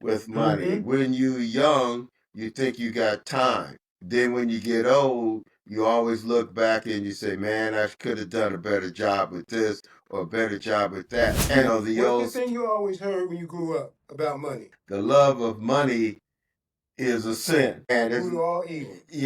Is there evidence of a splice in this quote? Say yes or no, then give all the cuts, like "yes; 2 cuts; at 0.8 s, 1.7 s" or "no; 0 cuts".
yes; 2 cuts; at 11.7 s, 14.6 s